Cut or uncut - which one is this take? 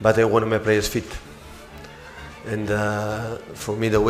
uncut